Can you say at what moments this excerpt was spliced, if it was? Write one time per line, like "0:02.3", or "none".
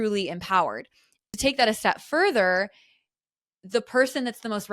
0:01.2